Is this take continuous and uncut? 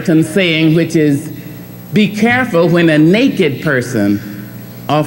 yes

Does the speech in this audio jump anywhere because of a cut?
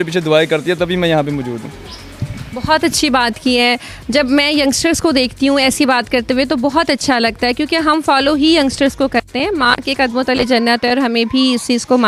no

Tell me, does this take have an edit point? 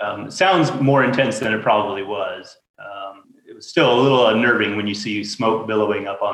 yes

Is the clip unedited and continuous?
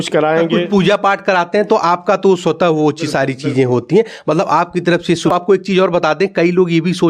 no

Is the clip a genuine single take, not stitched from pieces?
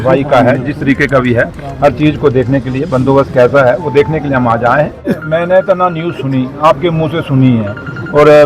no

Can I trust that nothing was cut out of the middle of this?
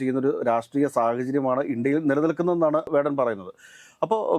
yes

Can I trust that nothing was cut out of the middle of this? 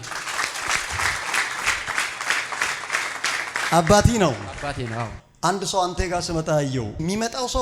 no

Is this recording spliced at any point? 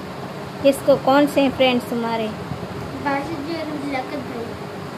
no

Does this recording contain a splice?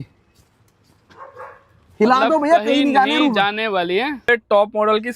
yes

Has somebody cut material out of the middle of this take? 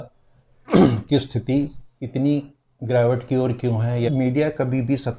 yes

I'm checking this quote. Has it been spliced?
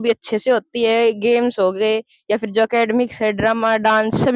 no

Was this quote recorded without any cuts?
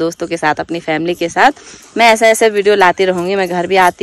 yes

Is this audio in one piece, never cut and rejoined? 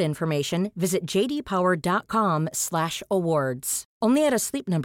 yes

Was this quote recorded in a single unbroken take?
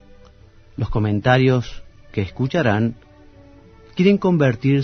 no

